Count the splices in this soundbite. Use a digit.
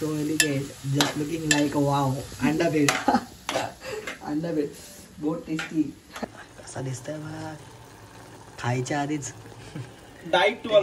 2